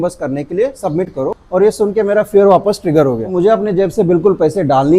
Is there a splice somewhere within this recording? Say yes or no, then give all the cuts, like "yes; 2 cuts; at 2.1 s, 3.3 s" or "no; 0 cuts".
yes; 2 cuts; at 1.4 s, 3.3 s